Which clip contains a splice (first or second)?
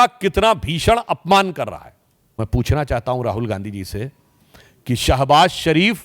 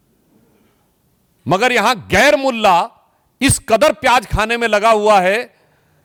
first